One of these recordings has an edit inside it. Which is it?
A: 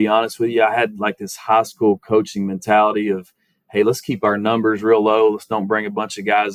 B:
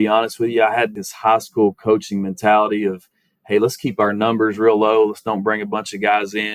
B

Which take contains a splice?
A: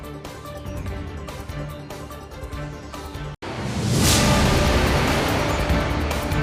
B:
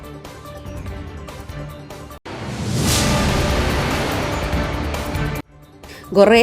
B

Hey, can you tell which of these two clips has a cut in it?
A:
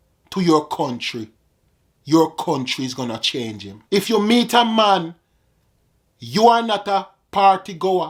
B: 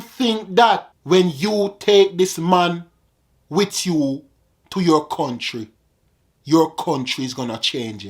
B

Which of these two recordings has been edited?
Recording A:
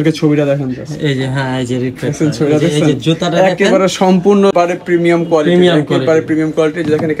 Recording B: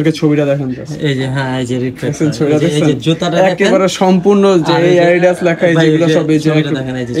A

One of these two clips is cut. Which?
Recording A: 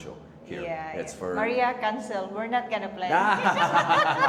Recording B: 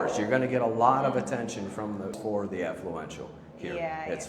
B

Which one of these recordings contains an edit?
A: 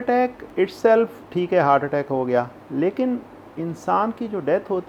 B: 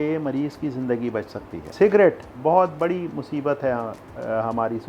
B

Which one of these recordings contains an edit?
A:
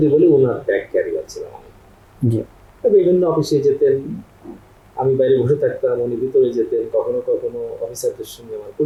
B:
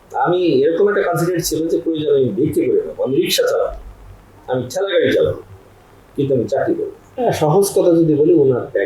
B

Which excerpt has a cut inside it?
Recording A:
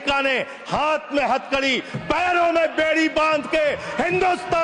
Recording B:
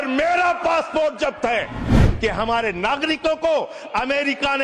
B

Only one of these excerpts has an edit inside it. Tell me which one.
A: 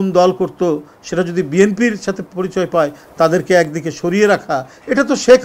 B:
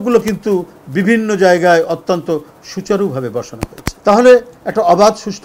B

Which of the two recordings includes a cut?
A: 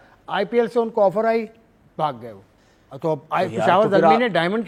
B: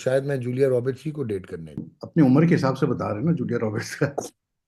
B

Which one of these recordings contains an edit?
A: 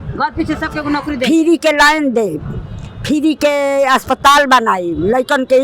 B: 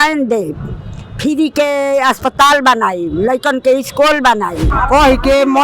B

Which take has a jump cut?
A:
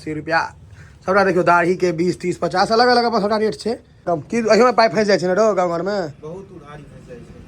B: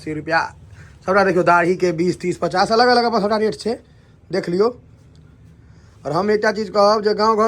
A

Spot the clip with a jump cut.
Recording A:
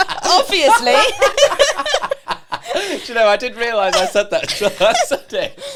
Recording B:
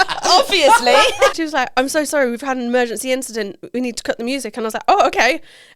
B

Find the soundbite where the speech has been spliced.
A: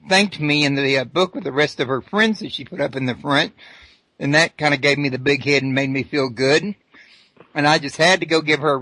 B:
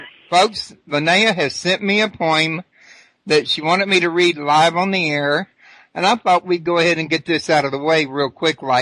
B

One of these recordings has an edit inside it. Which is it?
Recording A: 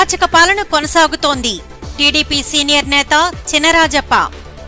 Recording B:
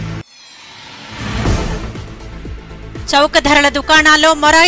B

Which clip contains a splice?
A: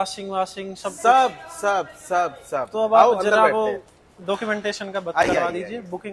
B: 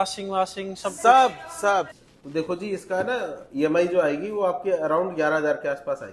B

